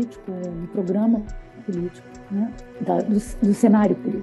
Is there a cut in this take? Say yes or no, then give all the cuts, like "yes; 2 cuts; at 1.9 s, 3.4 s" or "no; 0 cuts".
yes; 1 cut; at 2.6 s